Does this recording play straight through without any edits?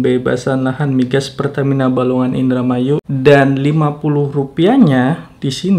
no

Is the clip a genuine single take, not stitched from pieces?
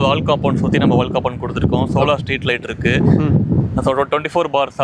yes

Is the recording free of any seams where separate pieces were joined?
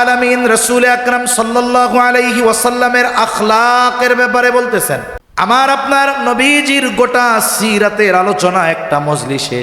no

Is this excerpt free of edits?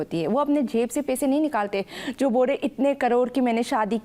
yes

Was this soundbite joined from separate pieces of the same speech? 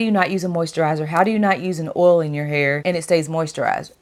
no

